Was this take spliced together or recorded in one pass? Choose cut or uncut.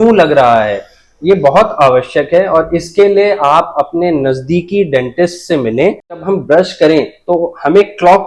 cut